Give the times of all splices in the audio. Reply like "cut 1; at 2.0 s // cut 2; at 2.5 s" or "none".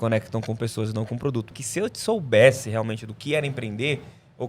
cut 1; at 1.5 s